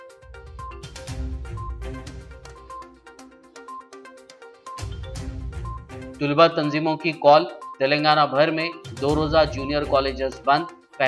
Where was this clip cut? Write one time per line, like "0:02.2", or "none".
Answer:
none